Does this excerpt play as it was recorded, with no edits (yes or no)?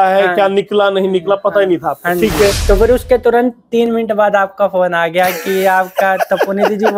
no